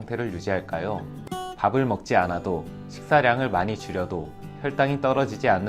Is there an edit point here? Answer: no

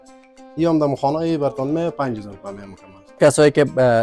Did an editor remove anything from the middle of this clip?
yes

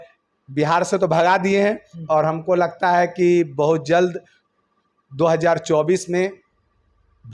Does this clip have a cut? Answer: no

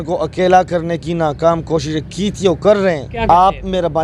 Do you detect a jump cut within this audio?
yes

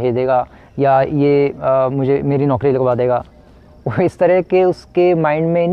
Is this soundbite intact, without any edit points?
yes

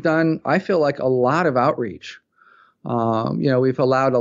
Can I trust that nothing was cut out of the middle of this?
yes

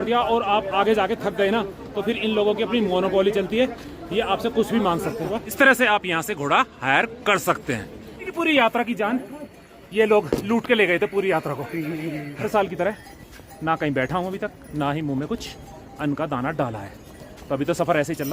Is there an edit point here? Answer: yes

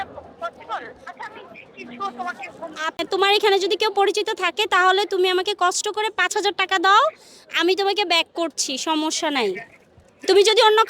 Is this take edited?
yes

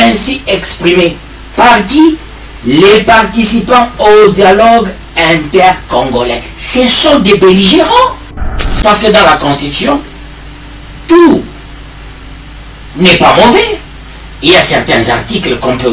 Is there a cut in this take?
yes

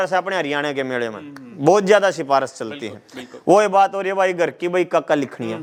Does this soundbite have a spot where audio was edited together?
no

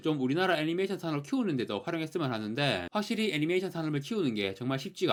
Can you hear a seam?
no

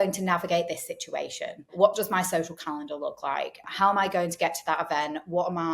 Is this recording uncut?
no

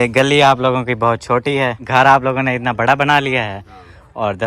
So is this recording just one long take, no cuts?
no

